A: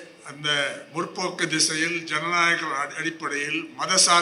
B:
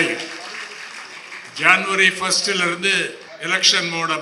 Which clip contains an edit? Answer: B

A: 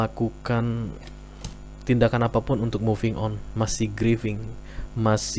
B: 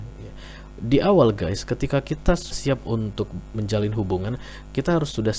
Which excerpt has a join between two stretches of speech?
B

